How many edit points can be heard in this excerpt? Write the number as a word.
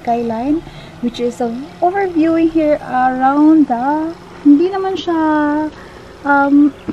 zero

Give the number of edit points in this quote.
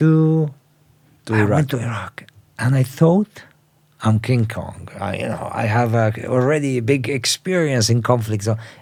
zero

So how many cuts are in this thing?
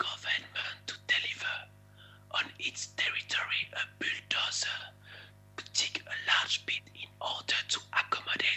zero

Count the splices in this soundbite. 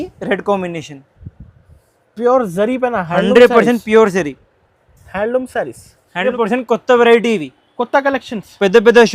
one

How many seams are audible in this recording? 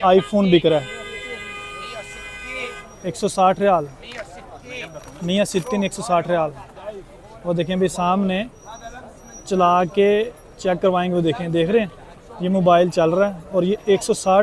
zero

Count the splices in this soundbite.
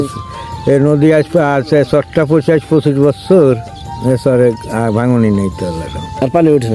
zero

